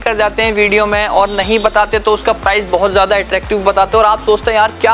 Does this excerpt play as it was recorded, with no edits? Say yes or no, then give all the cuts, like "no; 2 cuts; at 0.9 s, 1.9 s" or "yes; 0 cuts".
yes; 0 cuts